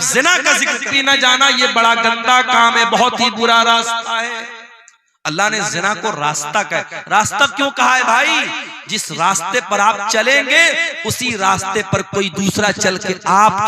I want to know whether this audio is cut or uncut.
cut